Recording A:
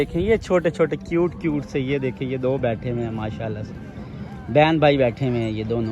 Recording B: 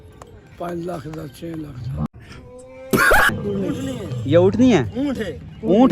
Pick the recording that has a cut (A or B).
B